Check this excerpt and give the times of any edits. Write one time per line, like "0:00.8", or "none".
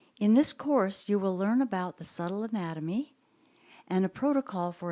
0:01.0